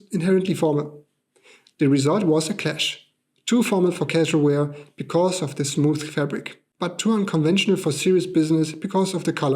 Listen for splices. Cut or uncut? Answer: cut